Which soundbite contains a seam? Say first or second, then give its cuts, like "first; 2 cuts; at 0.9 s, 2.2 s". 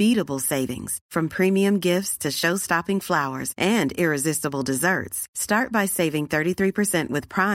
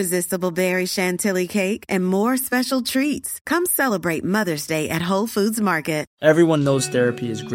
second; 1 cut; at 6.1 s